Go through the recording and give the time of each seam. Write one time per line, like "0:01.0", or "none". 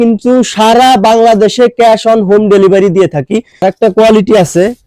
0:03.5